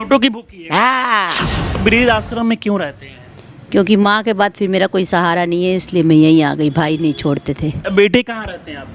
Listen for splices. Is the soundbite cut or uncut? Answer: cut